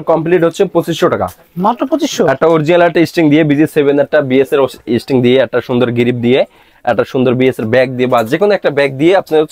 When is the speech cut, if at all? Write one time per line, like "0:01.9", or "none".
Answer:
none